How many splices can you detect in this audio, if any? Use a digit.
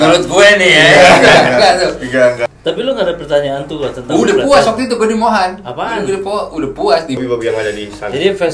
2